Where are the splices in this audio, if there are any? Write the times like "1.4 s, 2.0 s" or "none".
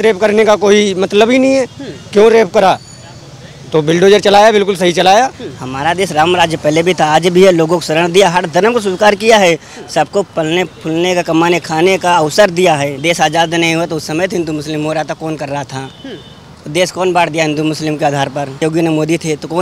5.5 s, 12.9 s, 18.6 s